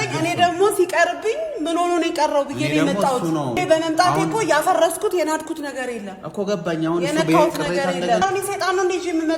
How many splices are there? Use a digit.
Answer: 2